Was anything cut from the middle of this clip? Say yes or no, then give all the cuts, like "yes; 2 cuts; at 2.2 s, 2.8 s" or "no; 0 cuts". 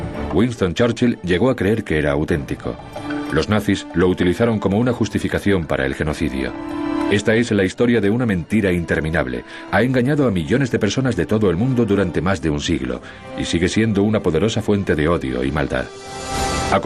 no; 0 cuts